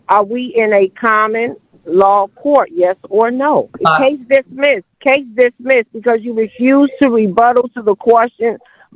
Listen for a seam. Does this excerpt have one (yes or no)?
yes